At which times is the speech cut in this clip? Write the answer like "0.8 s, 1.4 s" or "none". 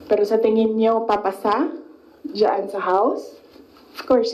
none